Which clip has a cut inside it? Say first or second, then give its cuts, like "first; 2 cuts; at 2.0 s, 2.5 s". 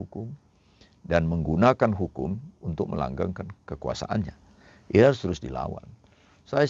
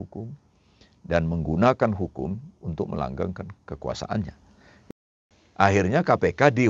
second; 1 cut; at 4.9 s